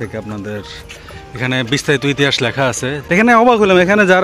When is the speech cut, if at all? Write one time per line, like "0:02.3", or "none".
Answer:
0:02.9